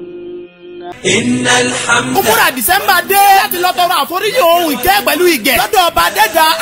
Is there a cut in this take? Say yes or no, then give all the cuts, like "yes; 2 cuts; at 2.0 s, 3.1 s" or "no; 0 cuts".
yes; 1 cut; at 0.9 s